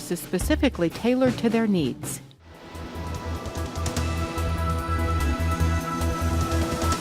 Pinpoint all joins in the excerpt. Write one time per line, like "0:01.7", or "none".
0:02.3